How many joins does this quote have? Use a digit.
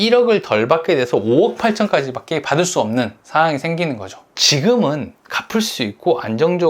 1